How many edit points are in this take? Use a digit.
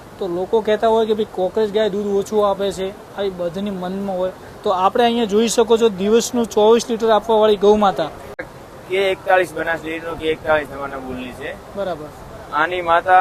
1